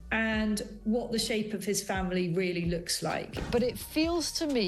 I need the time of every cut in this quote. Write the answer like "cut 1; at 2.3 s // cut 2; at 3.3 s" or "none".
cut 1; at 3.4 s